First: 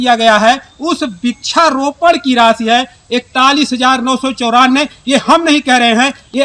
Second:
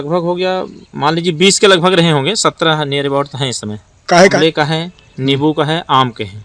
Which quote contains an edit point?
second; 1 cut; at 4.3 s

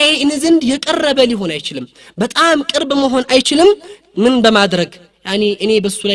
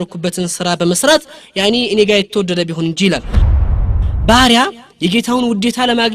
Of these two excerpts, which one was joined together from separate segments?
second; 1 cut; at 3.6 s

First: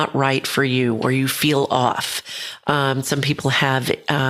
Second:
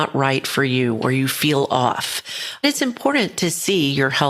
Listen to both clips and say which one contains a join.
second; 1 cut; at 2.6 s

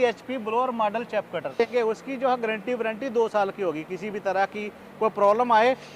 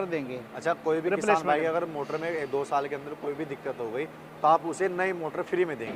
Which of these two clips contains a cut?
first; 1 cut; at 1.6 s

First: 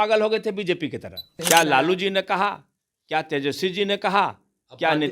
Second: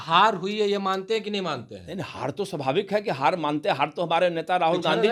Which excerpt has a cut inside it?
first; 1 cut; at 1.3 s

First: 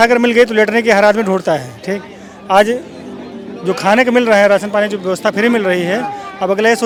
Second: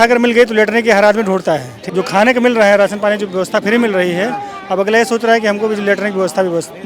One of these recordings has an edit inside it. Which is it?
second; 1 cut; at 1.8 s

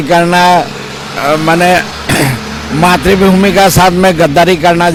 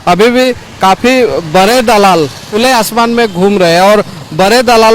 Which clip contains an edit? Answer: second; 1 cut; at 2.4 s

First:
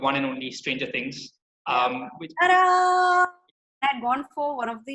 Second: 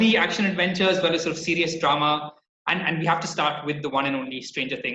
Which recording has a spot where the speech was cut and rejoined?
first; 1 cut; at 3.7 s

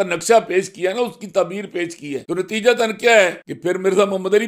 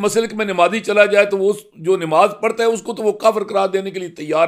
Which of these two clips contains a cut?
first; 2 cuts; at 2.2 s, 3.5 s

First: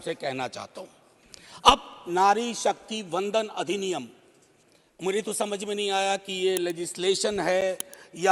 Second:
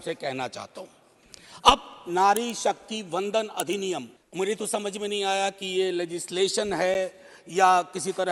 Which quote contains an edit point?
second; 1 cut; at 4.2 s

